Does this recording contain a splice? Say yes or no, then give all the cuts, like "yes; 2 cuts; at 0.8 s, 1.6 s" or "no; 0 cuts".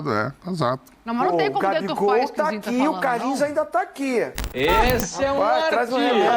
yes; 1 cut; at 4.4 s